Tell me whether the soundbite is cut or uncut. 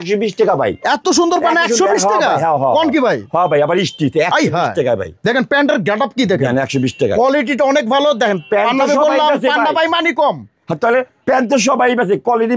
uncut